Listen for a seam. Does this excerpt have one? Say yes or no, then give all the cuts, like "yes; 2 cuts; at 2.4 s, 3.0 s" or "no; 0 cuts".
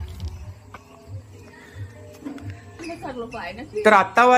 no; 0 cuts